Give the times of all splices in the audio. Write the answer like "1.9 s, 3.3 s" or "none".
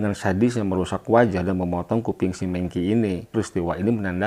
3.3 s